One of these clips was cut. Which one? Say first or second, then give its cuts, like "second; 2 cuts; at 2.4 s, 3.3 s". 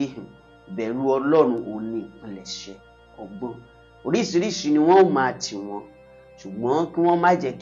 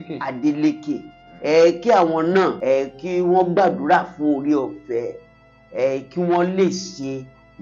second; 1 cut; at 2.6 s